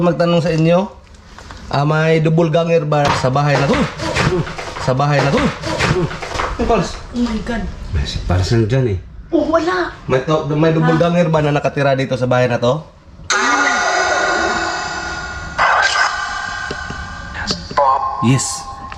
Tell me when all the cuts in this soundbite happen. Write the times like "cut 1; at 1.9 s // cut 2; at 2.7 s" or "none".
cut 1; at 3.2 s // cut 2; at 4.9 s // cut 3; at 6.4 s // cut 4; at 10.0 s